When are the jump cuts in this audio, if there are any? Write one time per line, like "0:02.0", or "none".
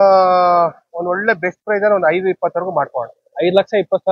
none